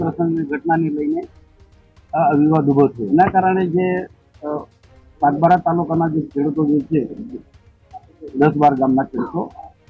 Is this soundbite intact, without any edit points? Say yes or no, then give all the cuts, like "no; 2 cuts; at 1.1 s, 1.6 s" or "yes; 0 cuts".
no; 1 cut; at 3.0 s